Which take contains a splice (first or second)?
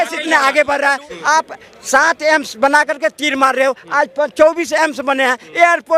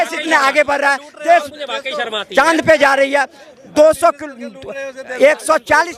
first